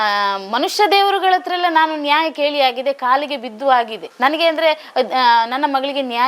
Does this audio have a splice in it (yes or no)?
no